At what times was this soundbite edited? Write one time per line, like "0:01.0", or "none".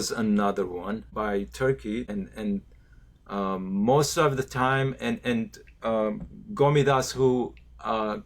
0:01.1
0:02.1